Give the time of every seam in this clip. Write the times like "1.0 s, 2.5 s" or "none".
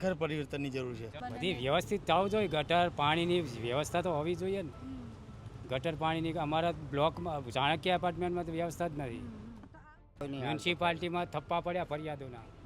1.2 s, 9.9 s